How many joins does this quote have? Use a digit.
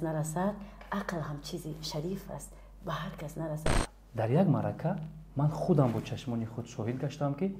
1